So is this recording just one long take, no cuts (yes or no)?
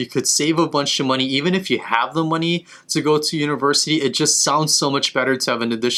yes